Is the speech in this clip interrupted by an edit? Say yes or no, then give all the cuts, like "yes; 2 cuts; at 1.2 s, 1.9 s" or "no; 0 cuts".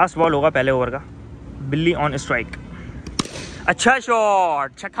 no; 0 cuts